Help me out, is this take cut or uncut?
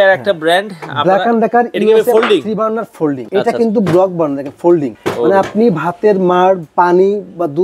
uncut